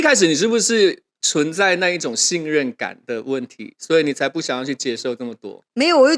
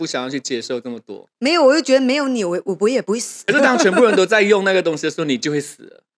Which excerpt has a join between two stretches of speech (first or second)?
second